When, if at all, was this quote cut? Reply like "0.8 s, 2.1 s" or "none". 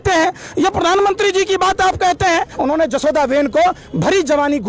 2.5 s